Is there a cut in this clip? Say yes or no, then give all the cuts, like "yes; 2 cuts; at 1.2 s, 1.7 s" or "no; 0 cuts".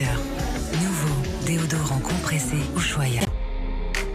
no; 0 cuts